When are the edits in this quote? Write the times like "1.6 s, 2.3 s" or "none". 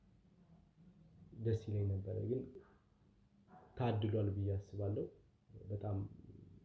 2.6 s